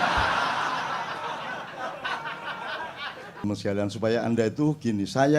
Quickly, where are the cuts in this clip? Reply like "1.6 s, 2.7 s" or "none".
3.4 s